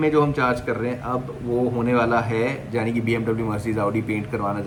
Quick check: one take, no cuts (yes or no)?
yes